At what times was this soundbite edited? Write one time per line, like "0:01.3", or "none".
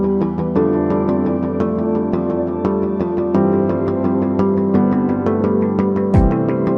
none